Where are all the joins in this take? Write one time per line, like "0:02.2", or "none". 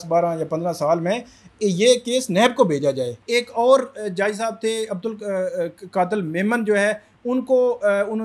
0:03.1